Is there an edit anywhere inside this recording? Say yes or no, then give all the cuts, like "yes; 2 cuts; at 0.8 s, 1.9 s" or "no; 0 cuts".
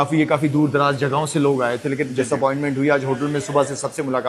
no; 0 cuts